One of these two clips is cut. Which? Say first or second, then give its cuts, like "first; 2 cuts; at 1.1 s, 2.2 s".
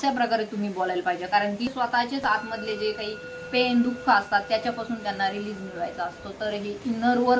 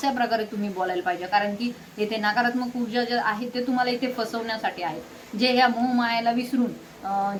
first; 1 cut; at 1.7 s